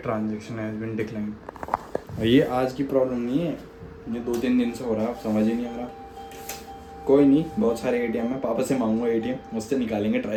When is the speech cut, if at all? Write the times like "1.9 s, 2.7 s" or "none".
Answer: none